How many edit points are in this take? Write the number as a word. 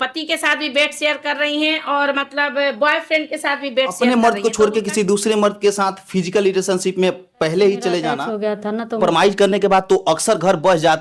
two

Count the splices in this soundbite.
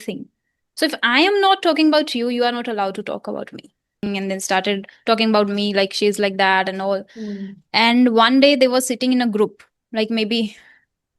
one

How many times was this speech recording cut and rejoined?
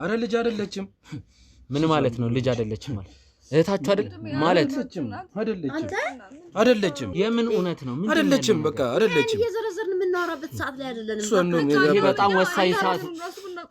one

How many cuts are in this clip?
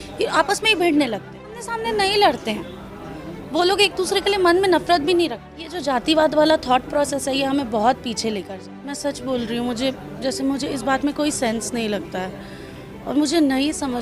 three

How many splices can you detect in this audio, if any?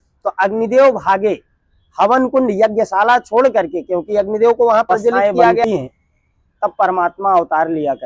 one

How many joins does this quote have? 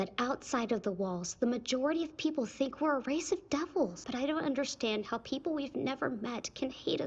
one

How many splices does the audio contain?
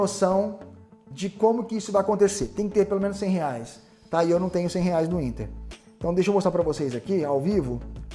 zero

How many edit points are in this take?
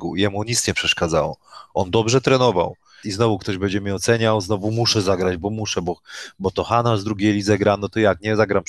one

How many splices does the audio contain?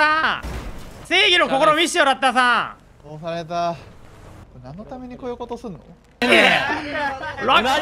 two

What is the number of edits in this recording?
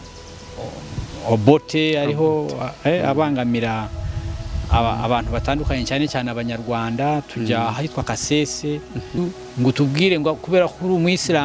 one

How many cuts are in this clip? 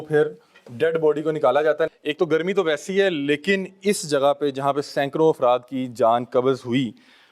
zero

